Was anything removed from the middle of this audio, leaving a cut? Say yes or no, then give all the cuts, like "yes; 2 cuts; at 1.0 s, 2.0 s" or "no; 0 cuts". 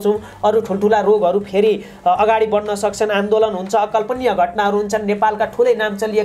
no; 0 cuts